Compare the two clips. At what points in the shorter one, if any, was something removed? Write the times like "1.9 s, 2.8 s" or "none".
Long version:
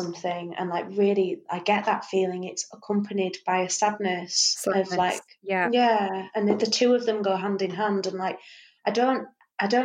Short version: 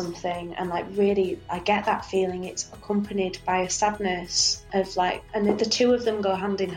5.3 s